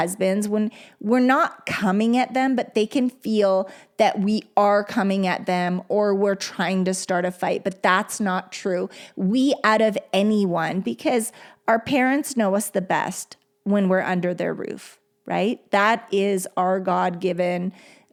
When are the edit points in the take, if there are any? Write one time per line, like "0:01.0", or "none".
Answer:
none